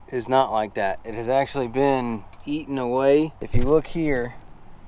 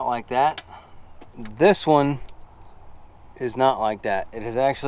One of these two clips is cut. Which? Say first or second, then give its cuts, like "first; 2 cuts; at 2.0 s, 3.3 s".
first; 1 cut; at 3.4 s